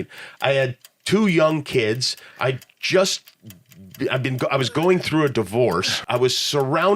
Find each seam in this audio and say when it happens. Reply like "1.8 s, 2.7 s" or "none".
6.0 s